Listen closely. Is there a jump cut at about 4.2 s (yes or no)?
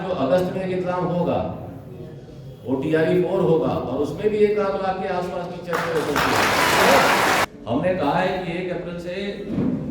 no